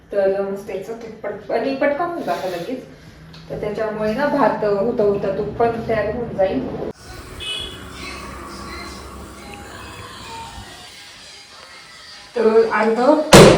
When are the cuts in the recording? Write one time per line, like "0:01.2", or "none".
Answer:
0:06.9